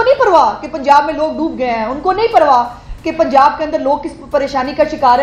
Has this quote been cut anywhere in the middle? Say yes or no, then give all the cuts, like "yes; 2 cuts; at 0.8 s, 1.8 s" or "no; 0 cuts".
no; 0 cuts